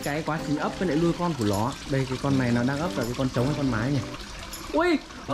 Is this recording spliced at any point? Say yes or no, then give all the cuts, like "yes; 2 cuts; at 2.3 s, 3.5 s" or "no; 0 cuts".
yes; 1 cut; at 1.8 s